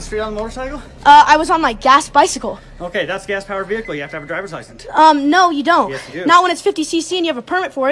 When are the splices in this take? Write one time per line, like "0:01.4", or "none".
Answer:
none